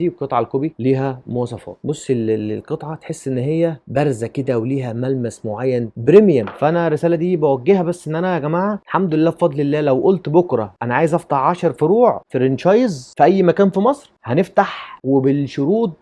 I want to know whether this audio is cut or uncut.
cut